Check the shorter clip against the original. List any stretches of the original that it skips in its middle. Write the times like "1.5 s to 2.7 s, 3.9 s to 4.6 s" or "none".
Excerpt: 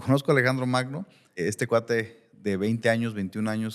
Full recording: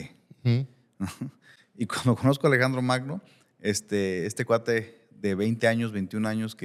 3.5 s to 4.2 s